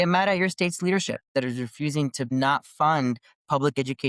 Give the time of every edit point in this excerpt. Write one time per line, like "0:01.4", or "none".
0:01.3
0:02.3